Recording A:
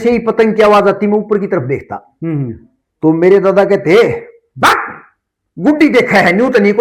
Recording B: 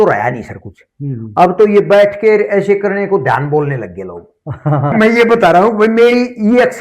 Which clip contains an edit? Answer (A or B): B